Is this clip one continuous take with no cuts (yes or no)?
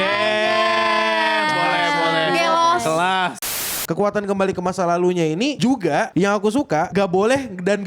no